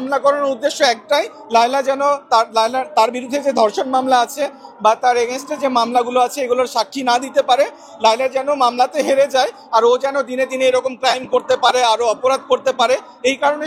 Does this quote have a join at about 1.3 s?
no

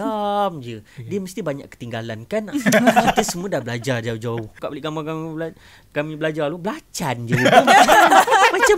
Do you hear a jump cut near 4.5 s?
yes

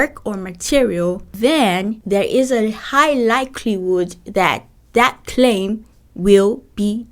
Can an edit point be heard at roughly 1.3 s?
yes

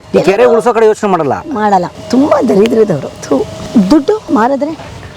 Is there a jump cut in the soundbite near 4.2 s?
yes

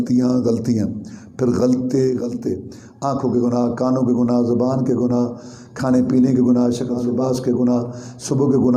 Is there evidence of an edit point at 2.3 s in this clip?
yes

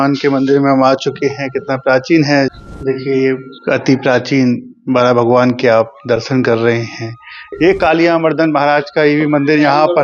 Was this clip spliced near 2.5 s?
yes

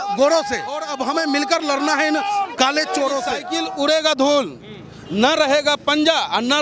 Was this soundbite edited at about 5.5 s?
no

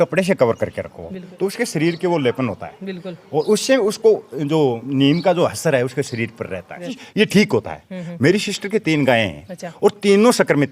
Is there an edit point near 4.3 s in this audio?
no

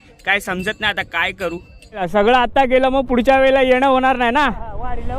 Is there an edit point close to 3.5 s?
no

